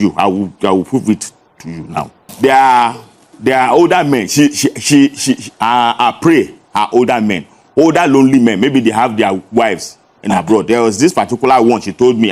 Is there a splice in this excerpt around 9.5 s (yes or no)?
no